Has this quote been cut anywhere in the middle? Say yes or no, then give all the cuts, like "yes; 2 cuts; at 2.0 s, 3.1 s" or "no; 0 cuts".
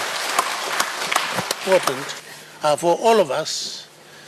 yes; 1 cut; at 1.6 s